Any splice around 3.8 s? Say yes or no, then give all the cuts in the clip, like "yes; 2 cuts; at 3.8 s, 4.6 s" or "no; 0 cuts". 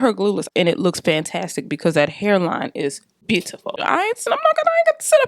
yes; 1 cut; at 3.8 s